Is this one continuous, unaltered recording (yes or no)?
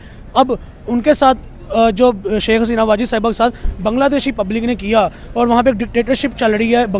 yes